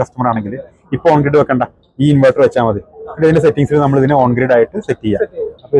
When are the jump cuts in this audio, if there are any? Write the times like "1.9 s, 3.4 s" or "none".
none